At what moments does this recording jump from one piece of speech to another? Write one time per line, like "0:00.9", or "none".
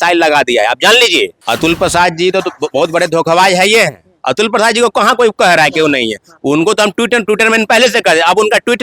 0:01.4